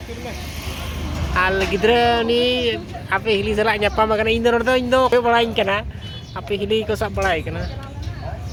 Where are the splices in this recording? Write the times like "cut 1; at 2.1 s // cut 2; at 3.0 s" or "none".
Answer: none